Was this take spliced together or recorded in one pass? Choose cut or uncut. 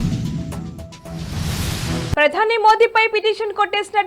cut